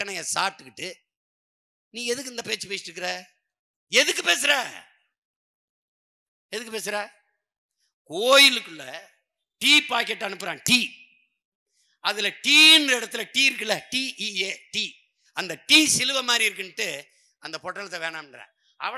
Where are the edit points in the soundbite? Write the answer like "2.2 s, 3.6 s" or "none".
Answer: none